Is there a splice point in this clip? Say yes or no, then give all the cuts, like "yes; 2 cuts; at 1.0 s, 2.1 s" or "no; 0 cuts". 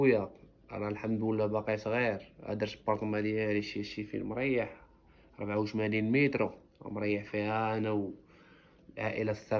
no; 0 cuts